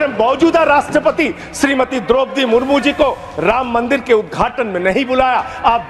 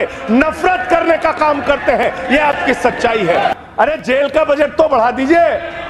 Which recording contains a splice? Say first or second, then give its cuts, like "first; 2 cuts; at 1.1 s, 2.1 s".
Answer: second; 1 cut; at 3.6 s